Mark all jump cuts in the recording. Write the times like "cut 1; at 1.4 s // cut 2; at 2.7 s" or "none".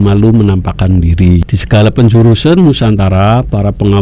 cut 1; at 1.4 s